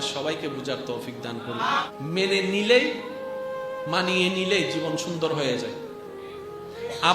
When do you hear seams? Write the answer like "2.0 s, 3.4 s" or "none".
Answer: 1.9 s

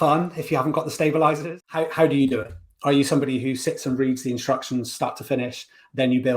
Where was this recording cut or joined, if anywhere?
1.5 s

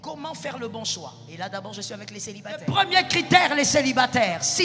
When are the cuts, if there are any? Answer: 2.6 s

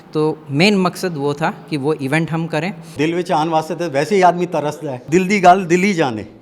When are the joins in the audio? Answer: 2.9 s, 5.0 s

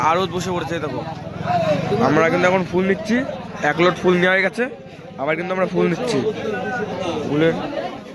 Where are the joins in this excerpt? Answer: none

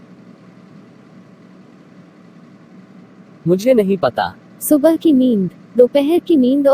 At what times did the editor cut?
1.2 s

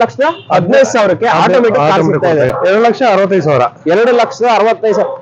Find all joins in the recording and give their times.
2.5 s

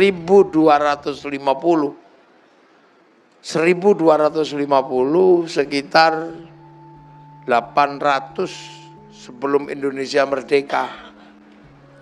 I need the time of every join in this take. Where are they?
none

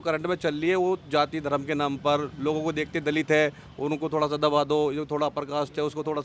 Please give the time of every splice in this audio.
none

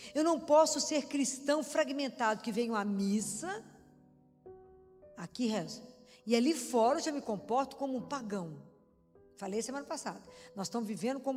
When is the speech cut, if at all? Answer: none

